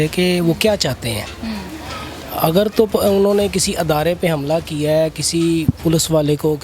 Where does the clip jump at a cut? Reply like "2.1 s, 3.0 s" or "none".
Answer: none

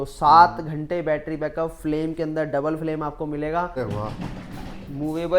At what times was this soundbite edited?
3.8 s

